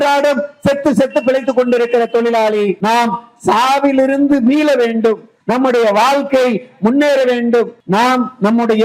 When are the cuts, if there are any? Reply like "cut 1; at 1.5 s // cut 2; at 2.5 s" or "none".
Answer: cut 1; at 2.8 s // cut 2; at 5.3 s // cut 3; at 7.8 s

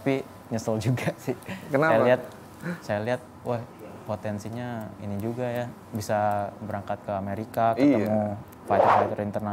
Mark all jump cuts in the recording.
none

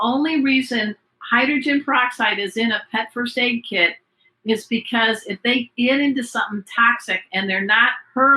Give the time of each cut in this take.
none

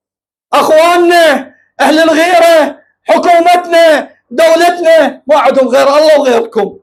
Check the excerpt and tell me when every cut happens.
none

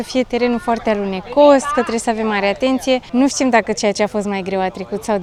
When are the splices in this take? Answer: none

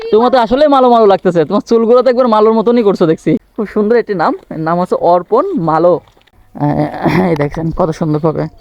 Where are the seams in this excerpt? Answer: cut 1; at 3.6 s // cut 2; at 6.2 s

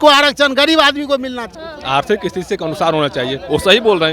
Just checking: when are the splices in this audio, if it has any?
cut 1; at 1.5 s

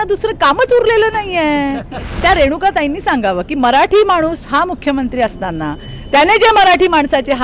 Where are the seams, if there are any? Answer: cut 1; at 2.1 s

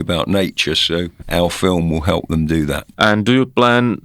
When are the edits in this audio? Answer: cut 1; at 1.2 s // cut 2; at 2.8 s

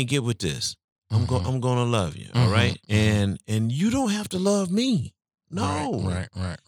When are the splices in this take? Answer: cut 1; at 2.8 s // cut 2; at 5.4 s

